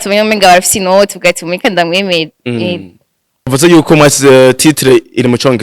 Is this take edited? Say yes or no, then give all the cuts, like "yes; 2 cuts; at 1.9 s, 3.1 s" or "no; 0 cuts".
yes; 1 cut; at 3.5 s